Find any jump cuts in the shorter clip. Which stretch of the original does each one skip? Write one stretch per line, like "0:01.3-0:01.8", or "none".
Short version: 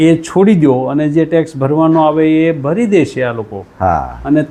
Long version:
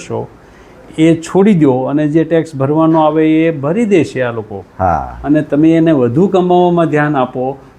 none